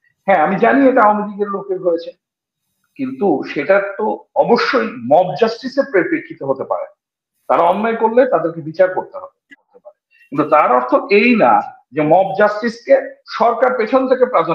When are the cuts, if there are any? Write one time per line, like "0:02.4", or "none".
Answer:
0:09.6